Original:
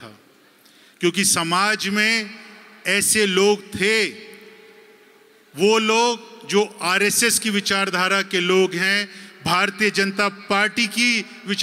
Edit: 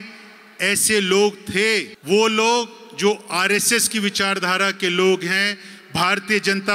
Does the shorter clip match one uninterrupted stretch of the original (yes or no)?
no